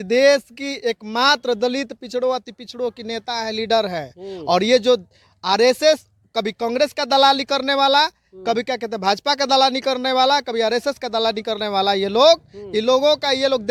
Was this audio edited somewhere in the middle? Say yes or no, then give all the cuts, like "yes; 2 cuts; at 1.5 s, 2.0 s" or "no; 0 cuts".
no; 0 cuts